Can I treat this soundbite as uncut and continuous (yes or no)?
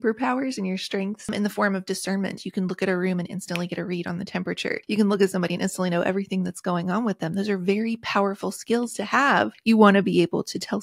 no